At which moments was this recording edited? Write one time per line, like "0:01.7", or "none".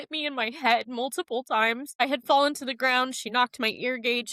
0:01.9